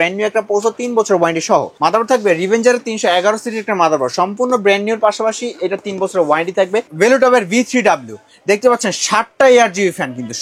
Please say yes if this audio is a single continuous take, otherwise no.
no